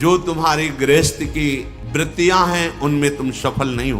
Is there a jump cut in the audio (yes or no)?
yes